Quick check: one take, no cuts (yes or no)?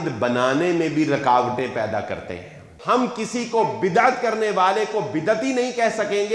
no